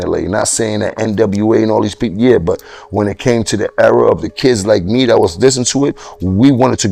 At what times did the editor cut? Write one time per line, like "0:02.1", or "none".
none